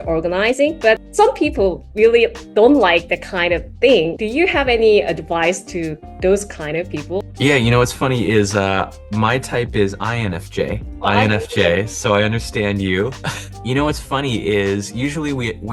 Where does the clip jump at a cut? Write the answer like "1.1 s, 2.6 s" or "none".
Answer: none